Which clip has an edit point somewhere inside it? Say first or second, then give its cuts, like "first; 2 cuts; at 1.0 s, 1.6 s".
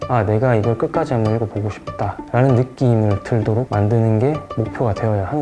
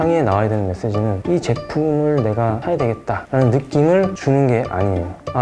second; 3 cuts; at 1.2 s, 2.9 s, 4.2 s